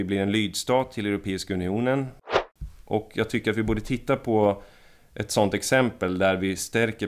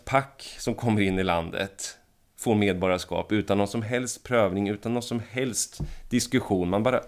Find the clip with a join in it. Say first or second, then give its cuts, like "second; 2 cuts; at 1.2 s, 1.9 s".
first; 1 cut; at 2.3 s